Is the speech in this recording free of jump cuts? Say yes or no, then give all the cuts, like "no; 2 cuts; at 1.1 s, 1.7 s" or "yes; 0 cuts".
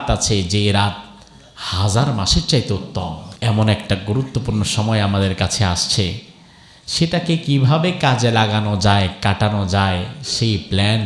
no; 1 cut; at 3.3 s